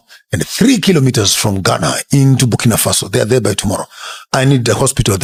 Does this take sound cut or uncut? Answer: uncut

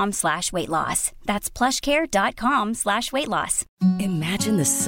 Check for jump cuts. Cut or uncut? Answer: cut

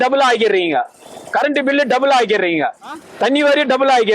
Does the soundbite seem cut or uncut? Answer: cut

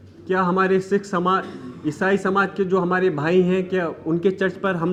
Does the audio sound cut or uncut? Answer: uncut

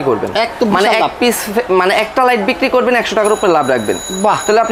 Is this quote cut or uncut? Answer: uncut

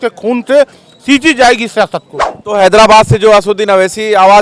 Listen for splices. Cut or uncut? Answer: cut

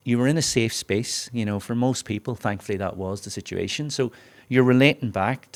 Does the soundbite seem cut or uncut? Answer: uncut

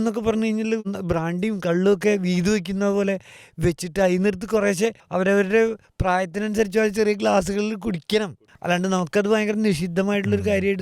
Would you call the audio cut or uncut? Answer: cut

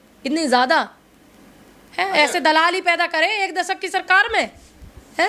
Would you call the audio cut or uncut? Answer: uncut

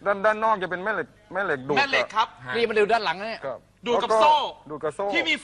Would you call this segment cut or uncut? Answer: uncut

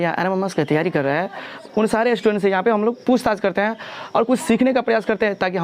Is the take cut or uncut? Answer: cut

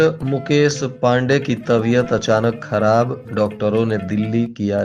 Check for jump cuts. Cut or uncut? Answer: uncut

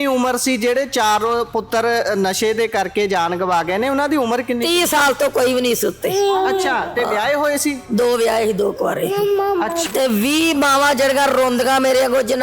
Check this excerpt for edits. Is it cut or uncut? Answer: cut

